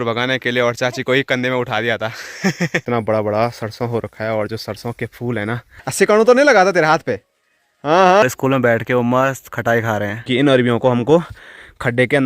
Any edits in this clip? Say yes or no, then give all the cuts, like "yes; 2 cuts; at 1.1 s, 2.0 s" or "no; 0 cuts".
yes; 4 cuts; at 2.8 s, 5.8 s, 8.2 s, 10.2 s